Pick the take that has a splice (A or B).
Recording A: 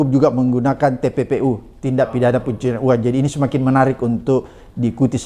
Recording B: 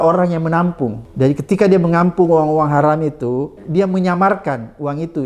B